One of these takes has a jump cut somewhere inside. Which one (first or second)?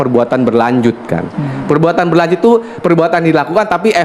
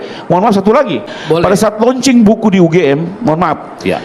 second